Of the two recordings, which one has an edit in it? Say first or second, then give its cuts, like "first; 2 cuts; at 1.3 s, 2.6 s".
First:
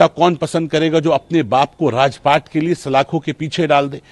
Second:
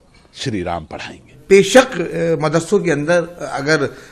second; 1 cut; at 1.4 s